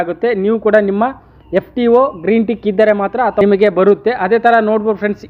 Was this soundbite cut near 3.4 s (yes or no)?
yes